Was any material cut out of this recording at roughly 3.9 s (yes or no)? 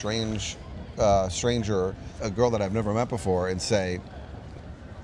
no